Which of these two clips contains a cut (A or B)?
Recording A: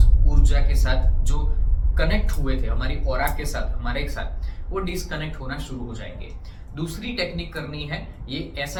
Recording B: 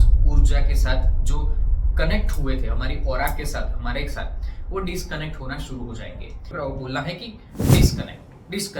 B